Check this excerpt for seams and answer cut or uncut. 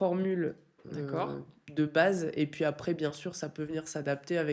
uncut